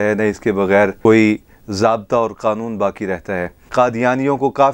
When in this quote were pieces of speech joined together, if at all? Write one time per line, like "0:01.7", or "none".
0:01.0
0:03.6